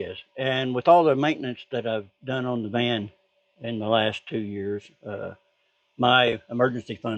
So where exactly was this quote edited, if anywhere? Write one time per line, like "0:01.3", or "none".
none

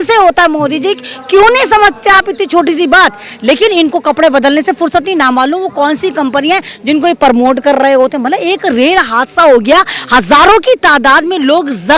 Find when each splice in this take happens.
none

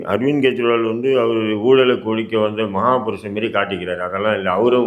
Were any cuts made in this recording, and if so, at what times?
none

